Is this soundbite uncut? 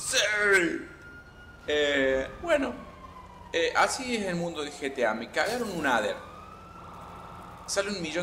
yes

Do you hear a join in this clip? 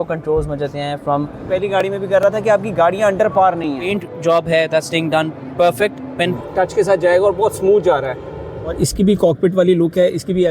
yes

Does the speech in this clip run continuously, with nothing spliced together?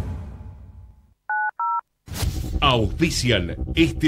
no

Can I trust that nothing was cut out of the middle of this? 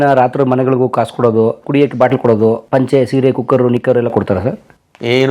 no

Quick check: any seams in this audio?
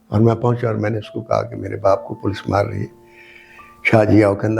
no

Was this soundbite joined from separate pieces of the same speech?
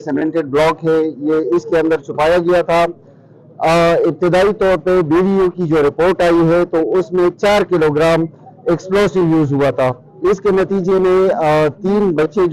no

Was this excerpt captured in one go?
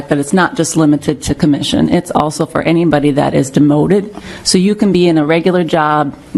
yes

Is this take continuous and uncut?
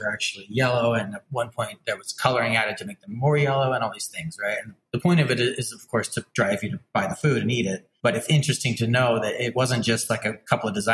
no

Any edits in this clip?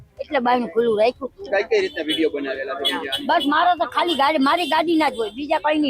yes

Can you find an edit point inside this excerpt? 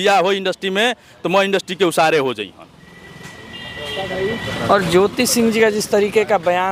no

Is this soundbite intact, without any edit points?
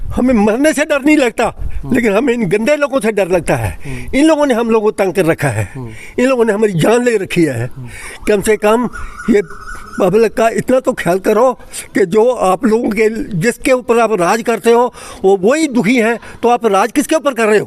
yes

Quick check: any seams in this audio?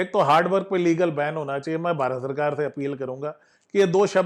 no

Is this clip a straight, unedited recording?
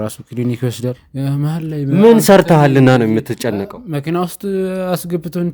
no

